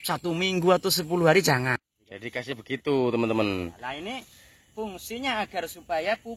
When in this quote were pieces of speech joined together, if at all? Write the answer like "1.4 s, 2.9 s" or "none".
1.8 s